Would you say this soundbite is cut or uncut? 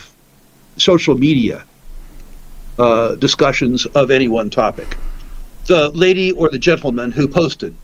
uncut